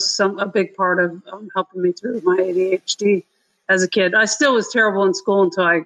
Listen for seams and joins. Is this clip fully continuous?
yes; 0 cuts

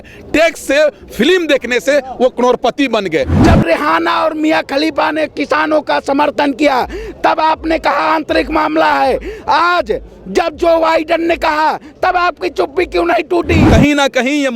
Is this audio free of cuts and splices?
no; 2 cuts; at 3.4 s, 13.6 s

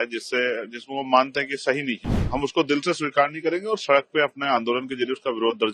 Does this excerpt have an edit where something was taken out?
yes; 1 cut; at 2.1 s

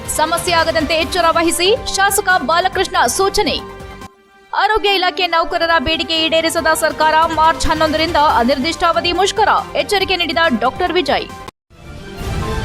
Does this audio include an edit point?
yes; 1 cut; at 11.5 s

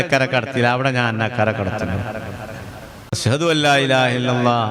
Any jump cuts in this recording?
yes; 1 cut; at 3.2 s

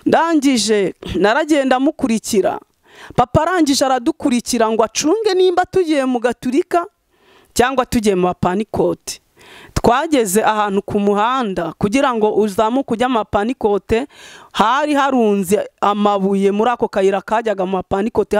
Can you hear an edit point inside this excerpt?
no; 0 cuts

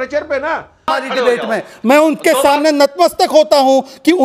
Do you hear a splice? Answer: yes; 1 cut; at 0.9 s

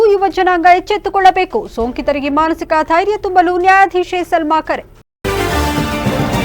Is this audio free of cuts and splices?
no; 1 cut; at 4.9 s

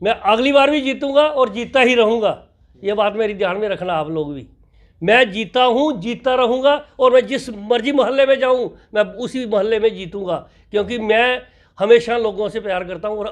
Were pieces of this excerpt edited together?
no; 0 cuts

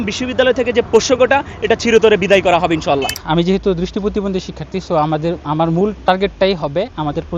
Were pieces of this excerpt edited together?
yes; 1 cut; at 3.2 s

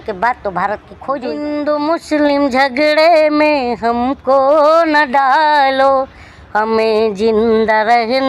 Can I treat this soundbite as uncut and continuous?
no; 1 cut; at 1.4 s

